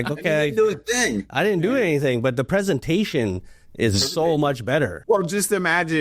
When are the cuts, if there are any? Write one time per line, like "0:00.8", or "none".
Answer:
0:05.0